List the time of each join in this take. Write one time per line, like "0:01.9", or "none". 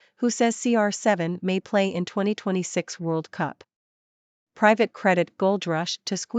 0:04.5